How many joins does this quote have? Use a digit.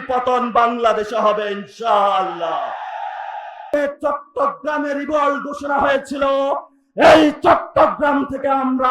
1